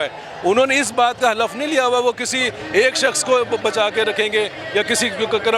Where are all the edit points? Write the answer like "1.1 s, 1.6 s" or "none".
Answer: none